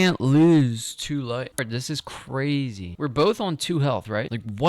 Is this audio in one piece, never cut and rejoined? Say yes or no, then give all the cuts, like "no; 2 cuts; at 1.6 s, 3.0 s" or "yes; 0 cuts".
no; 1 cut; at 1.6 s